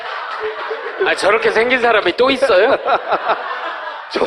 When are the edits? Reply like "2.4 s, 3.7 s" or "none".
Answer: 1.2 s